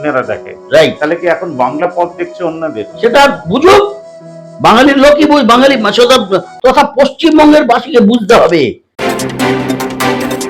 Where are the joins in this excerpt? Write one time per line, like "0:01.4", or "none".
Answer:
0:09.1